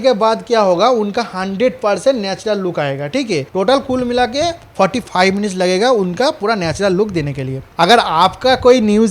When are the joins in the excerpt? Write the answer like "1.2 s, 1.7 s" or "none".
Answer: 3.5 s, 7.6 s

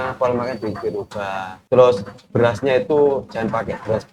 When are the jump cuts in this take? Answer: 1.5 s

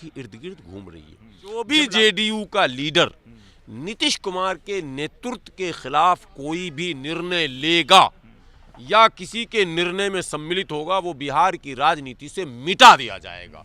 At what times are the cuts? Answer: 1.6 s

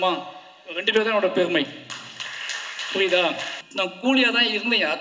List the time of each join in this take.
3.6 s

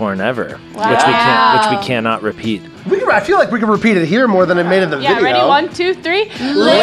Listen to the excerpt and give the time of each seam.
2.6 s

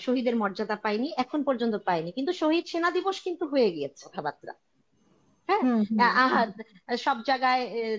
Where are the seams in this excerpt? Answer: 4.1 s

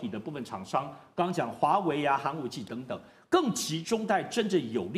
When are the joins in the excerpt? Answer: none

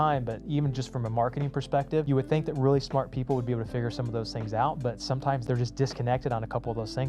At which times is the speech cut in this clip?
2.1 s, 5.4 s

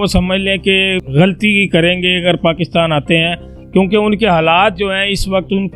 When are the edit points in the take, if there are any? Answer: 1.0 s

